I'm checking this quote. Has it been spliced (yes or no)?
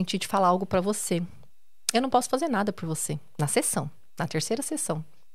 no